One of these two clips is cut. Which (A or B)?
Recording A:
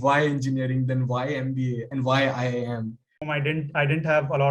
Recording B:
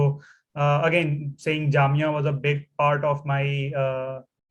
A